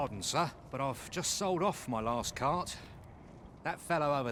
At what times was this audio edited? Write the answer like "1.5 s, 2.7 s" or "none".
none